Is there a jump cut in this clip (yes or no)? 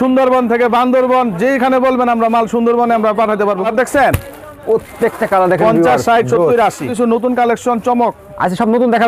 yes